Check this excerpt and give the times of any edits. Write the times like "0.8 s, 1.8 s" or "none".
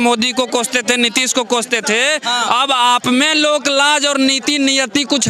none